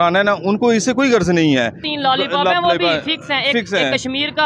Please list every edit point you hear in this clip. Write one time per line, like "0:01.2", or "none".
0:01.9